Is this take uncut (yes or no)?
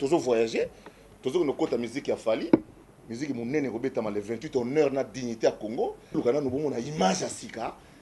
no